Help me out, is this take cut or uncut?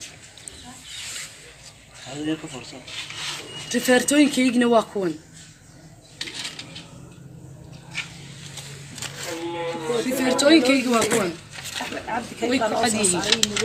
uncut